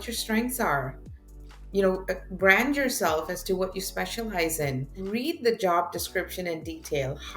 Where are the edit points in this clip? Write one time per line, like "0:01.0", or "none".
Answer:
0:05.0